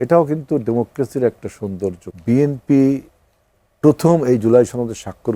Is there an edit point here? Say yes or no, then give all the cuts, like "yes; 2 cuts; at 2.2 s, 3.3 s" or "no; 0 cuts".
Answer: yes; 1 cut; at 2.0 s